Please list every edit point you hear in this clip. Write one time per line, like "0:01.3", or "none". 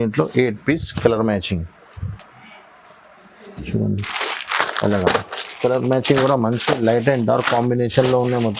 none

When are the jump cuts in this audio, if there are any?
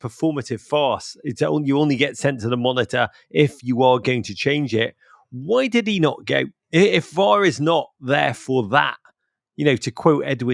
none

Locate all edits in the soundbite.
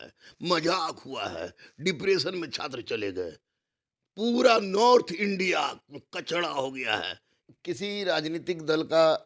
0:07.3

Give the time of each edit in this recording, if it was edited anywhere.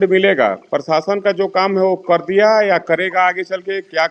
none

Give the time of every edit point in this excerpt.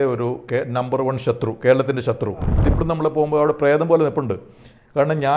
0:02.6

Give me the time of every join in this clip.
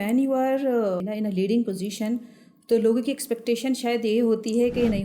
0:01.0

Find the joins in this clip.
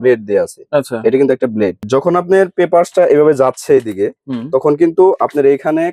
0:01.8

